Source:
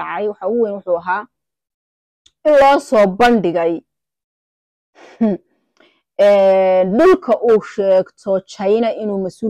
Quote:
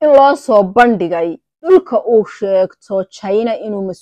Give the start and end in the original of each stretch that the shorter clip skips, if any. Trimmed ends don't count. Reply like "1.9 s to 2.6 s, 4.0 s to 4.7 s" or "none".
4.1 s to 7.0 s